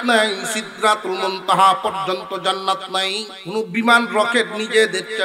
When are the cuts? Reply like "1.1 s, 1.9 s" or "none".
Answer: 3.3 s